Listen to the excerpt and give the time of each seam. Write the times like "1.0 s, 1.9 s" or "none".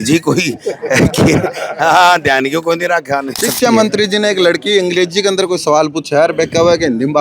3.4 s